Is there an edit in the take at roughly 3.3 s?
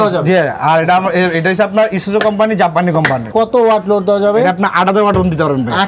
yes; 1 cut; at 3.3 s

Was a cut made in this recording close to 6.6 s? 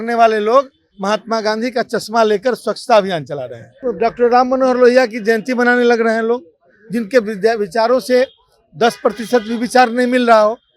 no; 1 cut; at 3.7 s

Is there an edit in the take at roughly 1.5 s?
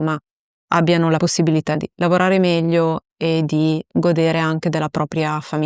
yes; 1 cut; at 1.5 s

